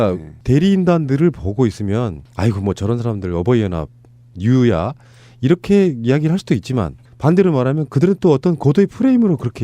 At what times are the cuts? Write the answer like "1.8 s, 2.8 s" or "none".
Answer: 2.6 s